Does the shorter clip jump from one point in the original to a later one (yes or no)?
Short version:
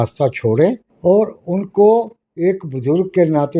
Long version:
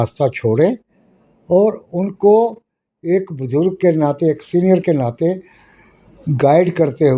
yes